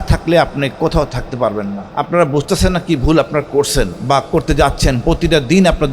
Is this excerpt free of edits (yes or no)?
no